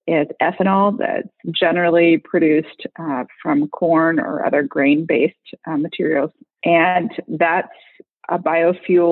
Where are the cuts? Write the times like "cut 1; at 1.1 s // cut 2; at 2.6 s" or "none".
cut 1; at 6.5 s // cut 2; at 8.2 s